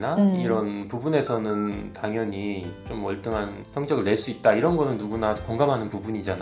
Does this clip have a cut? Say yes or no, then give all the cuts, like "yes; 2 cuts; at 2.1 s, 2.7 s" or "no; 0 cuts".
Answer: yes; 1 cut; at 3.6 s